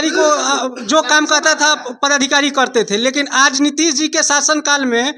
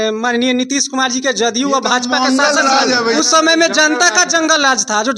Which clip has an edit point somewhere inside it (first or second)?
second